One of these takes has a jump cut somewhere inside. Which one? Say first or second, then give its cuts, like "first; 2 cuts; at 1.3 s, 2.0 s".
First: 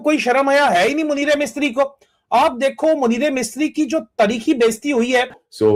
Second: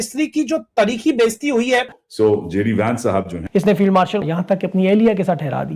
second; 2 cuts; at 3.4 s, 4.2 s